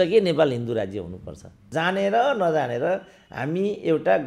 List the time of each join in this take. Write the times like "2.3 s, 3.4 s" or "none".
1.6 s